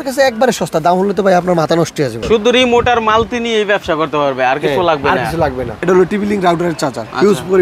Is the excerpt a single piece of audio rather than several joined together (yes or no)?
no